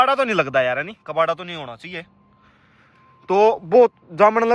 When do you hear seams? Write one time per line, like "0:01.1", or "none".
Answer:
none